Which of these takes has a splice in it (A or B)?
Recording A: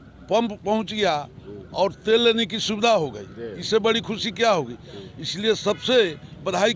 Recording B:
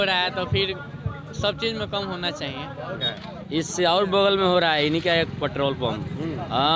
B